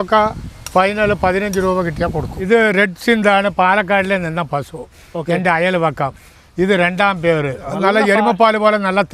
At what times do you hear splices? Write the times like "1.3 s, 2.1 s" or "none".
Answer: 2.3 s, 7.7 s